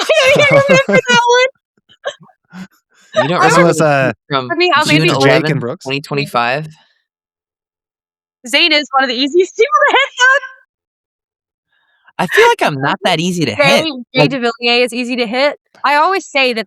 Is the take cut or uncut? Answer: cut